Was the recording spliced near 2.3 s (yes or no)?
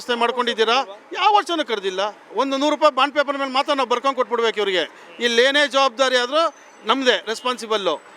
yes